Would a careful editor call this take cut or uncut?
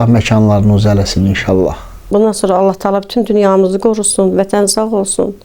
cut